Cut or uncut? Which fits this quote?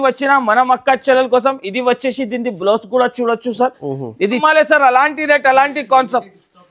cut